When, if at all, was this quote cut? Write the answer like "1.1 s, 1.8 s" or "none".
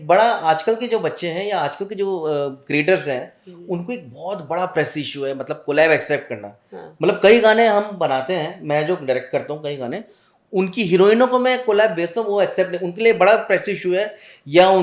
none